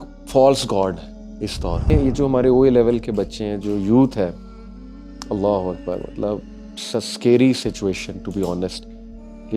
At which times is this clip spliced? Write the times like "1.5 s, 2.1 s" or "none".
1.9 s